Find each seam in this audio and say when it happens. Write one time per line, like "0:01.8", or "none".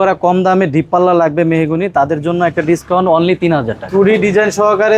0:03.8